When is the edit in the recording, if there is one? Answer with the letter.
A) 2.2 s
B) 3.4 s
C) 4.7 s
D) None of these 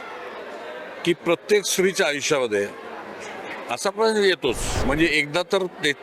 C